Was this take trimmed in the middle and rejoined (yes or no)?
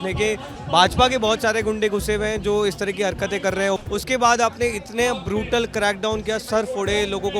yes